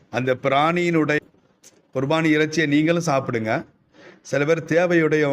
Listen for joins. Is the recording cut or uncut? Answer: cut